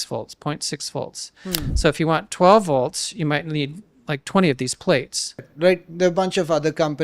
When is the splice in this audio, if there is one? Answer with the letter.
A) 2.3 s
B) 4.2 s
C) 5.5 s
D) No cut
C